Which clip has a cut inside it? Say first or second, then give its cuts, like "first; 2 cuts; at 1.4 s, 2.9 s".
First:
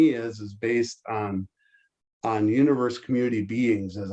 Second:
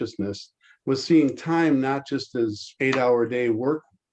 second; 1 cut; at 2.7 s